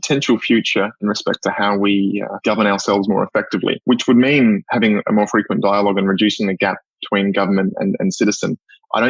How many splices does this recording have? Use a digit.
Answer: 3